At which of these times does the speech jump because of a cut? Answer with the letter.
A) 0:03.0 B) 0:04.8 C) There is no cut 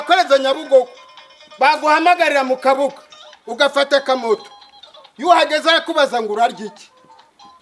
C